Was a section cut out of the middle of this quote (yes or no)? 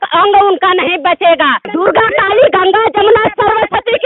yes